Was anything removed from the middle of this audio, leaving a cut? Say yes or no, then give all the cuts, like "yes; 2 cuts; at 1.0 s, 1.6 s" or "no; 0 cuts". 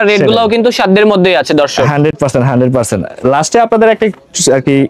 no; 0 cuts